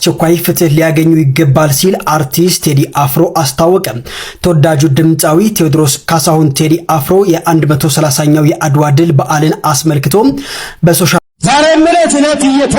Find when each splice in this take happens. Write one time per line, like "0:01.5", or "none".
0:11.2